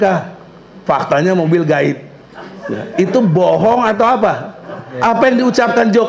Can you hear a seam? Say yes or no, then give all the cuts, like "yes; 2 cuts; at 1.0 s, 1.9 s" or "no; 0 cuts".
yes; 1 cut; at 4.8 s